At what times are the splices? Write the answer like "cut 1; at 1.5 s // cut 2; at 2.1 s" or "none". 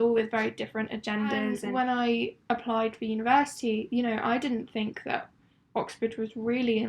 cut 1; at 1.6 s